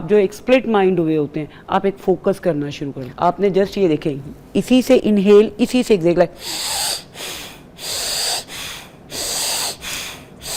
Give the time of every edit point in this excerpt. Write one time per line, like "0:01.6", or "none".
0:03.0